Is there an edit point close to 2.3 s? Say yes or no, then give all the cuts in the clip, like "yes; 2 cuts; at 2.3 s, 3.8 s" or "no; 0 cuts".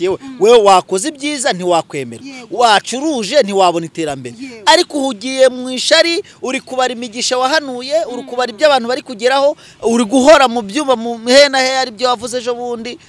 no; 0 cuts